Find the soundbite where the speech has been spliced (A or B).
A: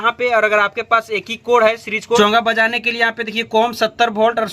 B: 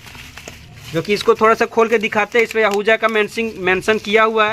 A